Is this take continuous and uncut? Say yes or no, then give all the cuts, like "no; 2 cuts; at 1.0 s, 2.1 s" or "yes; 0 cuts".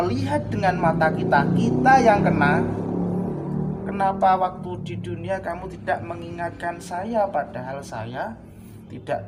yes; 0 cuts